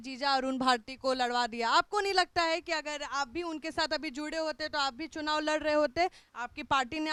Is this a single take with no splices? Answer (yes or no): yes